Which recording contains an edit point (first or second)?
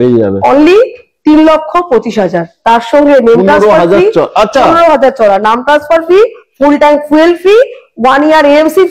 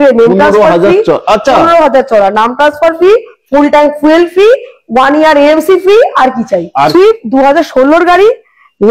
second